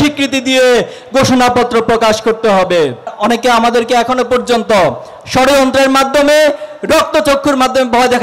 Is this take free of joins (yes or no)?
no